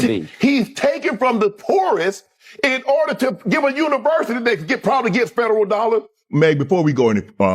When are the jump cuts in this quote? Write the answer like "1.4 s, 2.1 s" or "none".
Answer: 6.2 s

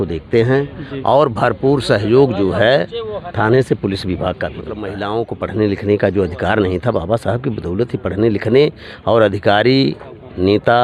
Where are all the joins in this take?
5.0 s

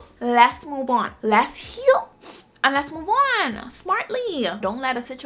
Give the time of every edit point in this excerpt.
none

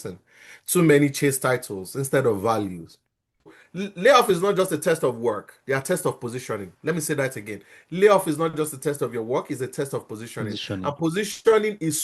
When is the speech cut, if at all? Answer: 3.5 s

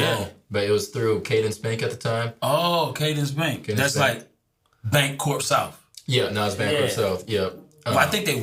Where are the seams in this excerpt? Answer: none

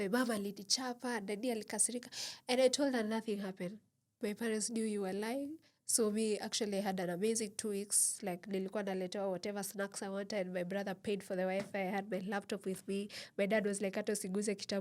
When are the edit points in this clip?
none

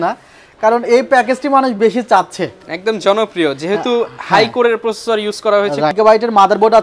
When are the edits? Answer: 5.9 s

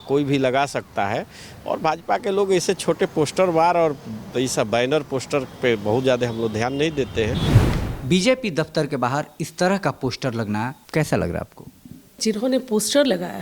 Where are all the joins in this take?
7.5 s, 10.8 s, 12.2 s

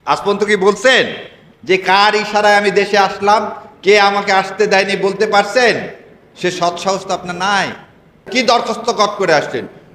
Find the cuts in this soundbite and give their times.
8.3 s

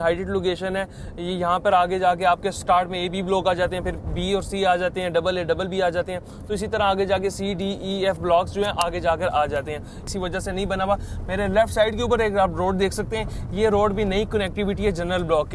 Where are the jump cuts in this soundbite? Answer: 10.0 s

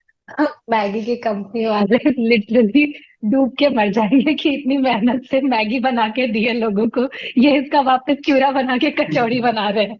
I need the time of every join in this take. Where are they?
none

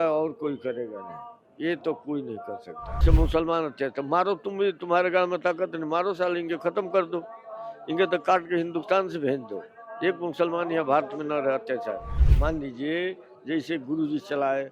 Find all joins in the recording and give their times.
3.0 s, 12.2 s

